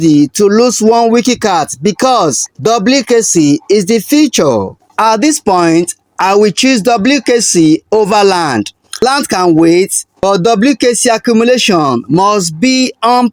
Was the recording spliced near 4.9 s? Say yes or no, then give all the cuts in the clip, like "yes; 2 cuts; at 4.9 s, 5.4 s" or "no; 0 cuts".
yes; 3 cuts; at 2.5 s, 4.9 s, 9.0 s